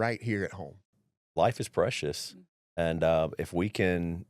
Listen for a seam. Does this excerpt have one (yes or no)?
yes